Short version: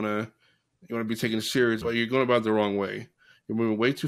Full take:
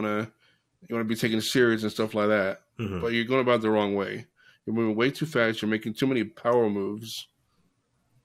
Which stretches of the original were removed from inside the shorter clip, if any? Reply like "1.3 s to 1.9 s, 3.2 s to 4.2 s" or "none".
1.8 s to 3.0 s

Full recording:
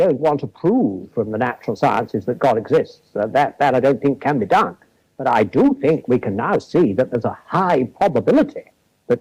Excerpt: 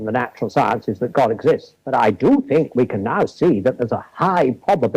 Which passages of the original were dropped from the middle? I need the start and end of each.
3.0 s to 5.1 s

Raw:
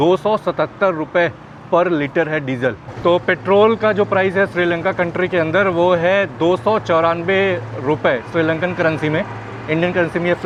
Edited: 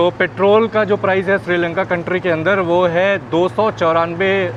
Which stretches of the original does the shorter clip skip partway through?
none

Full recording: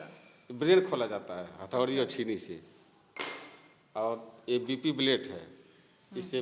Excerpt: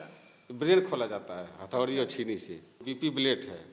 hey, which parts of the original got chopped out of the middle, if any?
2.8 s to 4.7 s

